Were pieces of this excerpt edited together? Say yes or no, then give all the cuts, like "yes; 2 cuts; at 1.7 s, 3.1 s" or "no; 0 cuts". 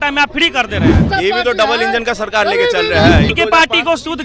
yes; 2 cuts; at 1.0 s, 3.3 s